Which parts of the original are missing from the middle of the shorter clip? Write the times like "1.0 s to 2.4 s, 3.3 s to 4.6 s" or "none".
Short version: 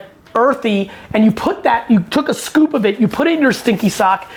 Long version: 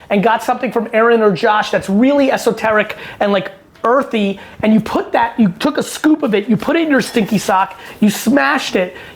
none